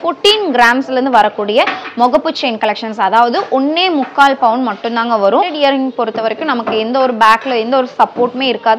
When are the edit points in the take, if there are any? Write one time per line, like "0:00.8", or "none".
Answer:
0:05.5